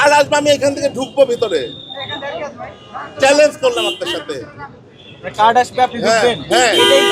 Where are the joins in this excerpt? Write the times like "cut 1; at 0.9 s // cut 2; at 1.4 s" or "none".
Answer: none